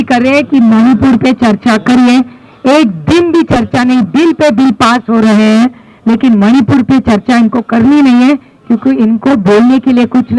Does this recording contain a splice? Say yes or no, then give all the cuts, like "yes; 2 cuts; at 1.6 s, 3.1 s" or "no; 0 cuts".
no; 0 cuts